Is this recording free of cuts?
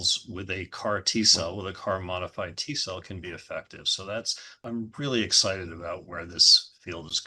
no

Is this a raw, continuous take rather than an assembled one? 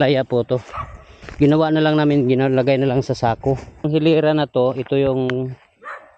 no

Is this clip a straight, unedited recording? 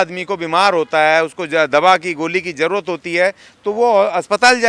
yes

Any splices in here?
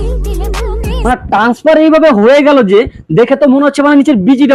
no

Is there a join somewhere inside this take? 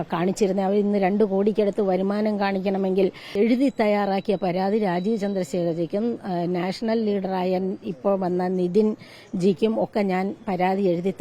yes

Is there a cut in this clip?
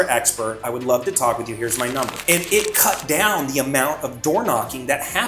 yes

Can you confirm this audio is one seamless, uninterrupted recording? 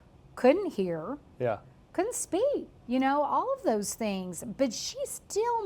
no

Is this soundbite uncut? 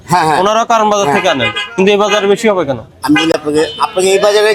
yes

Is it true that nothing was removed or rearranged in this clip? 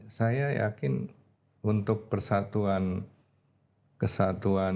yes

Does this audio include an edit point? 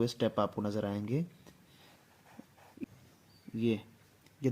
yes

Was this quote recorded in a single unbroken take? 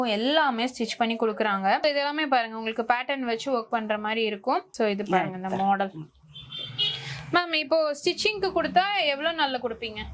yes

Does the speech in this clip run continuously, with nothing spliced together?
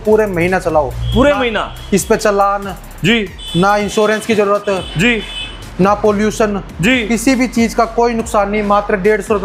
yes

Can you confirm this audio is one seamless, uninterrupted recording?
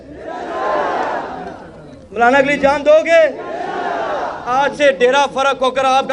yes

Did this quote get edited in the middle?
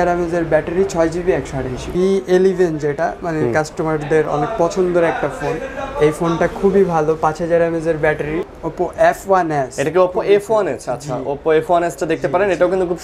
yes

